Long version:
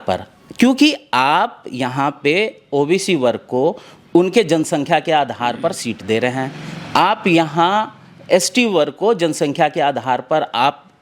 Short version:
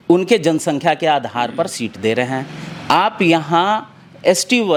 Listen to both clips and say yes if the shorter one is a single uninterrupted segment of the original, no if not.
yes